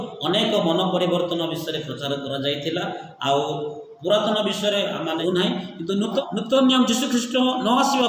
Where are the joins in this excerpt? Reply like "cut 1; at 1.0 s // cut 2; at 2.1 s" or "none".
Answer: cut 1; at 5.2 s // cut 2; at 6.2 s